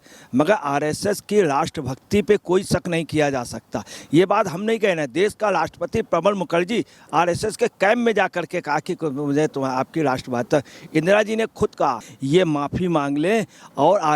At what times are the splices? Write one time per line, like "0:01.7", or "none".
0:12.1